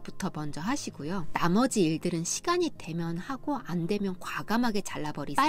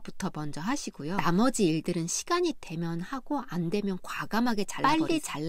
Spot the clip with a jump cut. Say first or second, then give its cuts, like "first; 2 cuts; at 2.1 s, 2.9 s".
second; 2 cuts; at 1.2 s, 4.7 s